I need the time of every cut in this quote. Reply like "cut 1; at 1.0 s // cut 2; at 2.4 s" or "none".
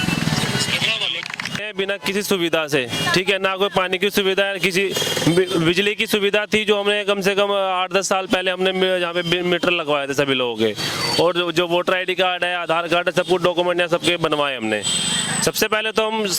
cut 1; at 1.6 s

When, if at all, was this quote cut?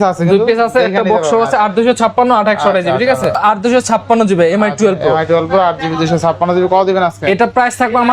cut 1; at 3.4 s

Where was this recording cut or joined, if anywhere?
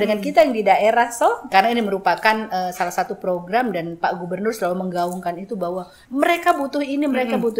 cut 1; at 1.5 s // cut 2; at 6.0 s

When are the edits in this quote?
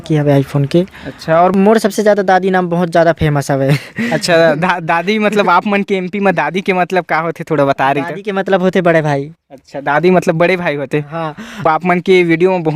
cut 1; at 1.5 s // cut 2; at 11.7 s

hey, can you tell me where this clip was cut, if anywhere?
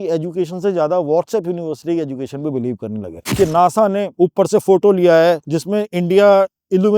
cut 1; at 3.2 s // cut 2; at 4.1 s // cut 3; at 5.5 s

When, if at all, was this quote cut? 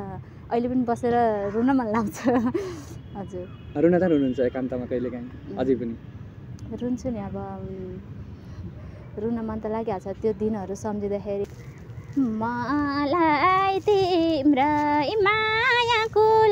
cut 1; at 11.4 s

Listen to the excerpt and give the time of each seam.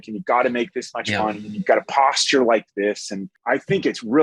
cut 1; at 3.3 s

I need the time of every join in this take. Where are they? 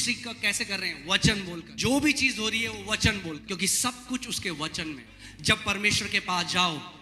cut 1; at 1.7 s // cut 2; at 3.4 s // cut 3; at 5.1 s

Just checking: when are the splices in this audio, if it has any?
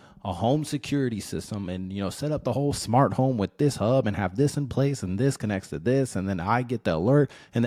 none

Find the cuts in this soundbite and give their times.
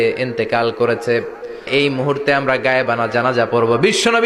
cut 1; at 1.7 s

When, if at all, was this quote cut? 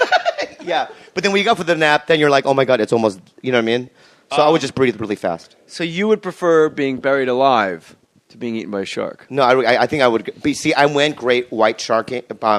cut 1; at 9.3 s

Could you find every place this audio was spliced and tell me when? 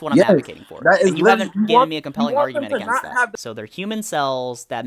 cut 1; at 3.4 s

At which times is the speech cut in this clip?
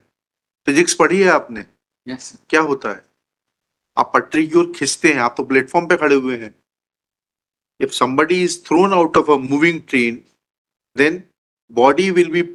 none

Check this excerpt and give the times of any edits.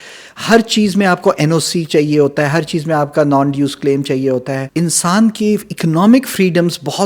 cut 1; at 4.6 s

